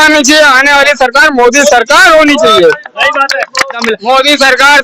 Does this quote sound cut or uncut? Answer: cut